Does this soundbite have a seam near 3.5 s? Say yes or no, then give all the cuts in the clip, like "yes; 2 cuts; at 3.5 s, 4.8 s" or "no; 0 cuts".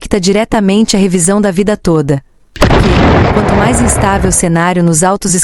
yes; 2 cuts; at 2.4 s, 3.5 s